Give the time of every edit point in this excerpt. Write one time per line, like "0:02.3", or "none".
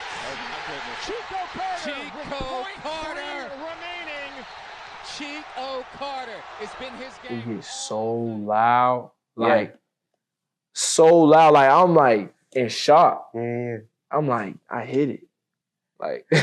none